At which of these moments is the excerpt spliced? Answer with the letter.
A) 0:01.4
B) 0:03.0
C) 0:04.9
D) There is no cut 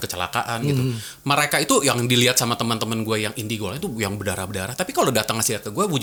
D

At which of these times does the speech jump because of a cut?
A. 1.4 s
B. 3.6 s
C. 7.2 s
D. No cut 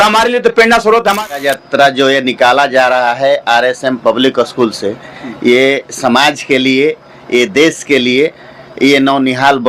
A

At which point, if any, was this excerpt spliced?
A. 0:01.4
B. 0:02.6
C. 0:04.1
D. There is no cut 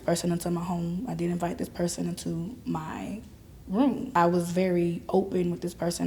C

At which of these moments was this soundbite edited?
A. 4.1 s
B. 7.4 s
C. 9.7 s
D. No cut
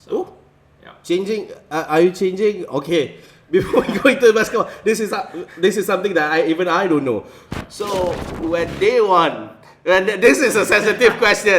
B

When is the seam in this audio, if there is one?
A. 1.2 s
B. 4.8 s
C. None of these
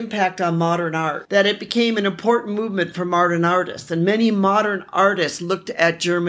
A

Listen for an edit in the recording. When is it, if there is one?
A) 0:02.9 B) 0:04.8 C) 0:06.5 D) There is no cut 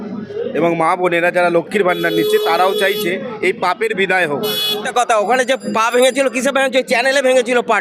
B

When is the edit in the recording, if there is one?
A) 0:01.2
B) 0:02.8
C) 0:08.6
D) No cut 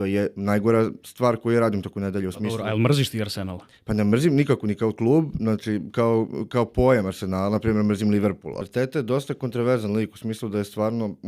C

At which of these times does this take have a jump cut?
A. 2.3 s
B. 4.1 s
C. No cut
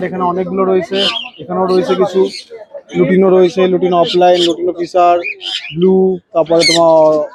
C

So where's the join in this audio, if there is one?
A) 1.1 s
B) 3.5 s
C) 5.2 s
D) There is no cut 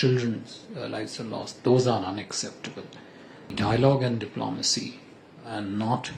B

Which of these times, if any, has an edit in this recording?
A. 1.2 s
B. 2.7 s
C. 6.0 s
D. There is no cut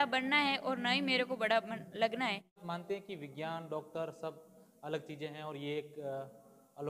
B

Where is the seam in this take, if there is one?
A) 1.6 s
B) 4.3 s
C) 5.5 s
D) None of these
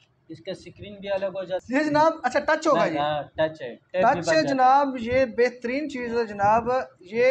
A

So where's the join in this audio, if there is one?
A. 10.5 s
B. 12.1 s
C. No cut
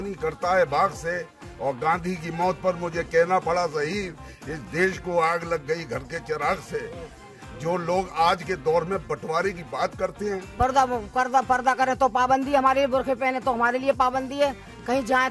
A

